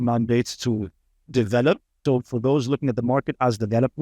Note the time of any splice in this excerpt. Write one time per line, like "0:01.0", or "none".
0:02.0